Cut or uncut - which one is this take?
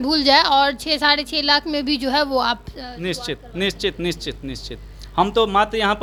uncut